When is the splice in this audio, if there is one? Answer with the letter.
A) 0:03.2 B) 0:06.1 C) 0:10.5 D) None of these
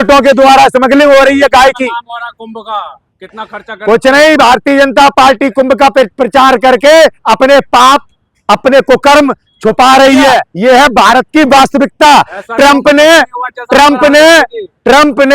C